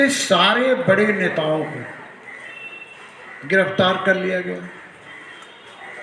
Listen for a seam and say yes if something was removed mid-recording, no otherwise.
no